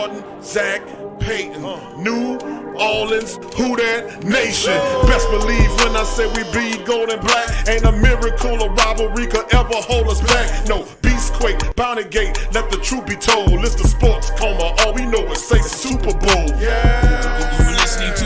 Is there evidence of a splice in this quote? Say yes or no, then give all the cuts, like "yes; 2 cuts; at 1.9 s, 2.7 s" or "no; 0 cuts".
no; 0 cuts